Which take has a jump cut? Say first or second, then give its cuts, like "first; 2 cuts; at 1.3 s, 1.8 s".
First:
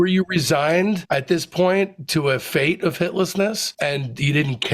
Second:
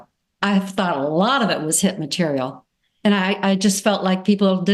first; 2 cuts; at 1.0 s, 3.7 s